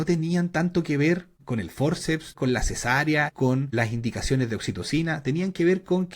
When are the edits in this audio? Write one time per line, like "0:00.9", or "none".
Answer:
0:01.4
0:02.3
0:03.4